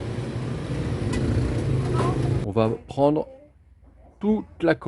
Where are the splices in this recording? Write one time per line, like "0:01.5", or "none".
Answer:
0:02.4